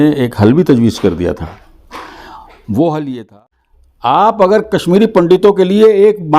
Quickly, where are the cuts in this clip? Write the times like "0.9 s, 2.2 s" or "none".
3.2 s